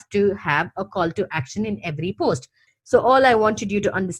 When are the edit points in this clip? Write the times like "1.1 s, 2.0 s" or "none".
2.6 s